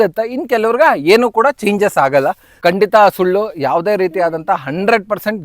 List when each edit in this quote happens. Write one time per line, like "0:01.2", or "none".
0:02.5